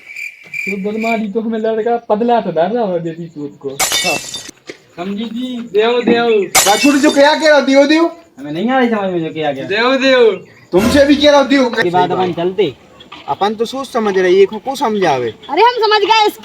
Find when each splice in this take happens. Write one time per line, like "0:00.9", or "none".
0:04.3
0:11.8